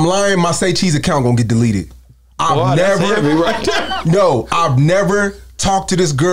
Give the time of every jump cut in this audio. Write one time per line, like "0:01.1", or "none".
none